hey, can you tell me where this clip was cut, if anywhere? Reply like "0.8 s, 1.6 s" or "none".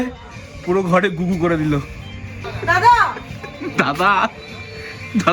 2.5 s

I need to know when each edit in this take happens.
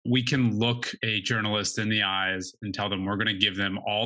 0.9 s

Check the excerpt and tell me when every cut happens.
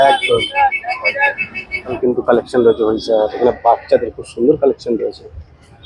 2.0 s

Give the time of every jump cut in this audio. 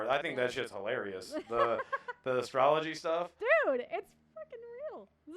none

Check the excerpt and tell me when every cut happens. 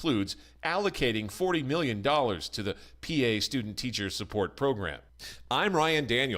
5.0 s

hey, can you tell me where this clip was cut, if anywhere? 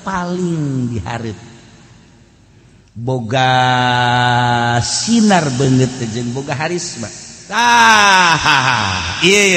7.6 s

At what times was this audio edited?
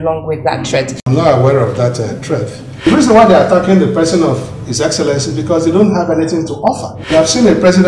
1.0 s, 2.8 s, 6.9 s

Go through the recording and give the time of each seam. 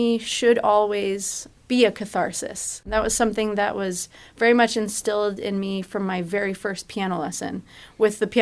1.4 s

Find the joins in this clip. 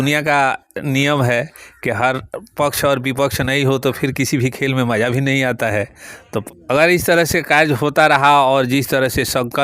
6.4 s

